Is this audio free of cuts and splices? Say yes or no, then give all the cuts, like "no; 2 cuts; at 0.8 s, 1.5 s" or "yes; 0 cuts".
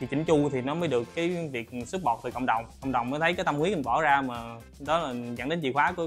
yes; 0 cuts